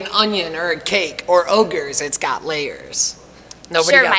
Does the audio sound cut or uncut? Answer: uncut